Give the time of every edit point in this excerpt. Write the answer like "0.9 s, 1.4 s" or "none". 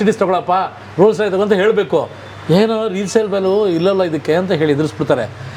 none